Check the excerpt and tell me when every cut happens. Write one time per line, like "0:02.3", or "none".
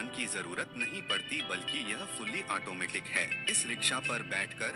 none